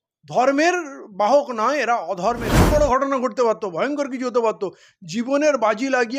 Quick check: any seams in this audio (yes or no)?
yes